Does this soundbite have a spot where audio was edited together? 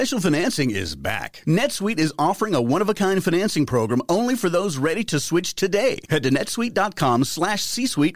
no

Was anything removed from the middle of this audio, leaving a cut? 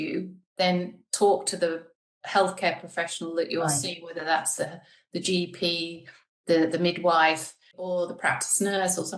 yes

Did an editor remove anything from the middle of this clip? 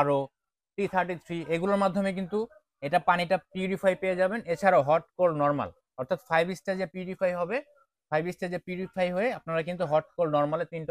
no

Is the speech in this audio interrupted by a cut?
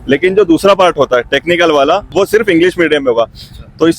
yes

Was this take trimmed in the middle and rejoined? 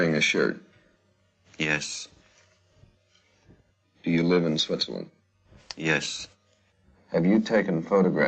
no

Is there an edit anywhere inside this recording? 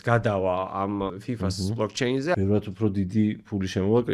yes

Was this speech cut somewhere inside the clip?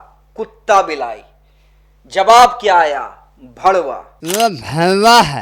yes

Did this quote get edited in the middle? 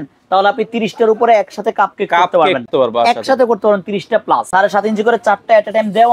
yes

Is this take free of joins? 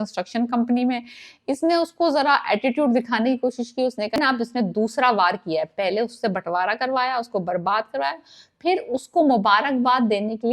no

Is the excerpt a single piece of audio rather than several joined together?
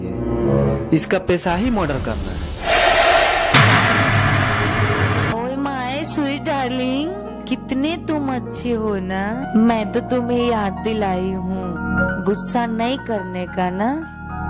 no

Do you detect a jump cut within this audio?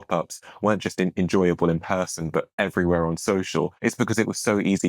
yes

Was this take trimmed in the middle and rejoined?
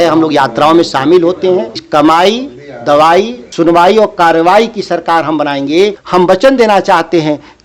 yes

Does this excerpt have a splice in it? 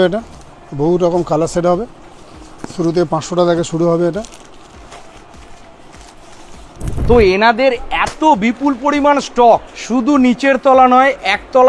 no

